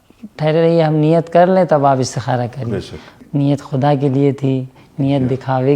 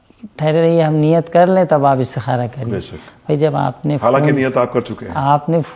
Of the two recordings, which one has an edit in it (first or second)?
first